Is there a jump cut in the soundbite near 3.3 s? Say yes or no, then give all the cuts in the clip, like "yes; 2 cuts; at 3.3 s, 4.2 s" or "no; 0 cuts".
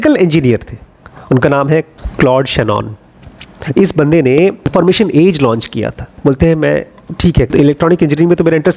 no; 3 cuts; at 1.9 s, 6.1 s, 7.5 s